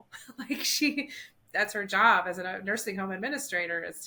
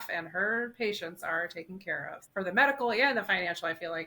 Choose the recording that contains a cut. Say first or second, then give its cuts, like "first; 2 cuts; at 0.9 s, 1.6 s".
second; 1 cut; at 2.2 s